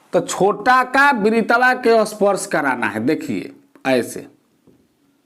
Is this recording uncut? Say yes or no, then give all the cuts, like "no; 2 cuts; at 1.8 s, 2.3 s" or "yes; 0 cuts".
yes; 0 cuts